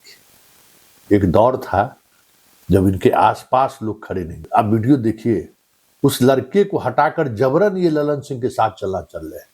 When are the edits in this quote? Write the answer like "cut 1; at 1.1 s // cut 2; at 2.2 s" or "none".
cut 1; at 4.4 s